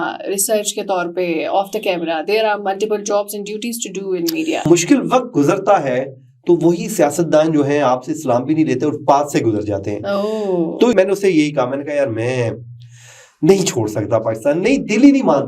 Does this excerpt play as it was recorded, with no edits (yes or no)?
no